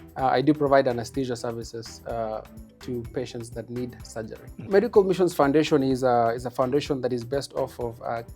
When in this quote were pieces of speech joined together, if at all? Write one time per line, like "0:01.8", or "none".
0:04.7